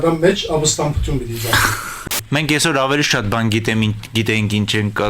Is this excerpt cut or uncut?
cut